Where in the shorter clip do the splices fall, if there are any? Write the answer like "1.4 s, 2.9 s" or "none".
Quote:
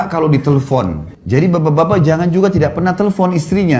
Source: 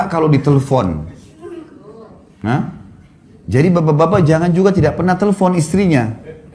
1.1 s